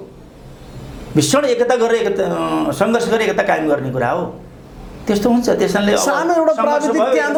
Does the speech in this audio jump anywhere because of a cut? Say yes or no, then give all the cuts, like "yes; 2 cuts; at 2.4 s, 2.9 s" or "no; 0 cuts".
no; 0 cuts